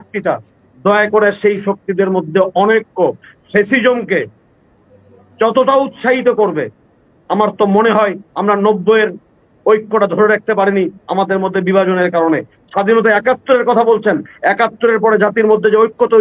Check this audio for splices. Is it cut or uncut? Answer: uncut